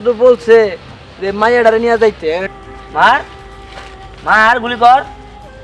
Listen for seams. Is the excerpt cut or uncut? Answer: cut